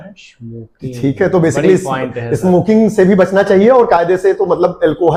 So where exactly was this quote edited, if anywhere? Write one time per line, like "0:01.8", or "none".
none